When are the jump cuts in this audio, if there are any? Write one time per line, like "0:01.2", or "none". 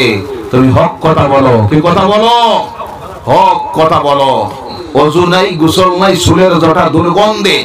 0:04.8